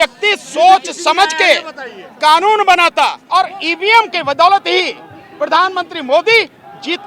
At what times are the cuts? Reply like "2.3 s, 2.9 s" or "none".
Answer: 3.2 s